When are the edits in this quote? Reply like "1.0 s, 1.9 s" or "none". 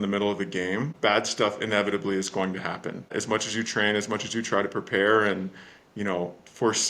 0.9 s, 3.1 s